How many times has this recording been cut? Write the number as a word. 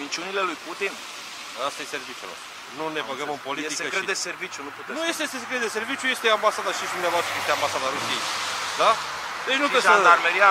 one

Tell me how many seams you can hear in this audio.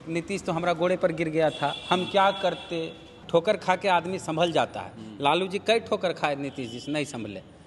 one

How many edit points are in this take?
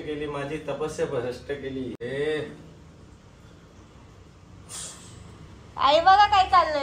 one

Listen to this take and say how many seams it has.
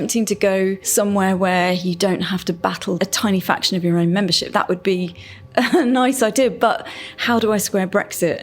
two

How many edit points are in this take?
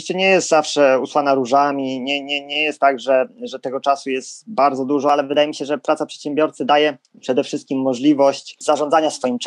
two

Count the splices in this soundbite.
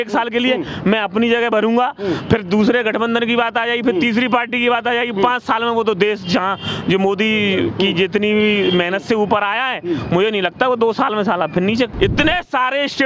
one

